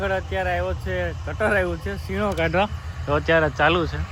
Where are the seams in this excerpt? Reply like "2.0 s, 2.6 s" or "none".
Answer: none